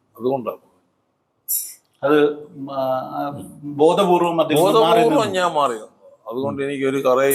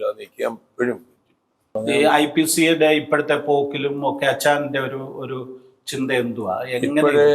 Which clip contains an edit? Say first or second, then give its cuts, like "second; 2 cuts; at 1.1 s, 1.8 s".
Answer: second; 1 cut; at 1.8 s